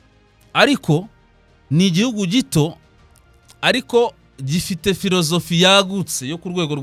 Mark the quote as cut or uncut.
uncut